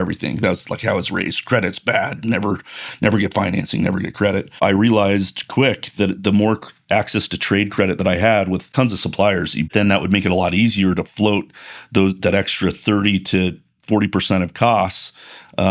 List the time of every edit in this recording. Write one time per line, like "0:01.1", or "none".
0:04.6
0:08.7
0:09.7